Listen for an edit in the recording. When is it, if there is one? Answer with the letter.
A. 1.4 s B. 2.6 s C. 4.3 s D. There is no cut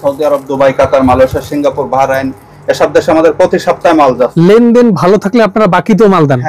C